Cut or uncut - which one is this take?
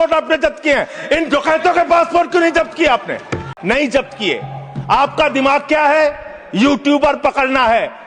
cut